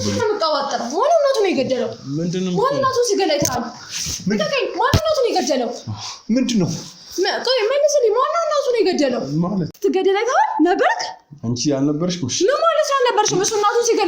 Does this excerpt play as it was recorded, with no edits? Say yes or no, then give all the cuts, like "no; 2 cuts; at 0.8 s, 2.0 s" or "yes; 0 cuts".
no; 1 cut; at 9.7 s